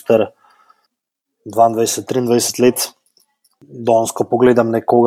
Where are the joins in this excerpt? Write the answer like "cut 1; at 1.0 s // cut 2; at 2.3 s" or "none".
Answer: none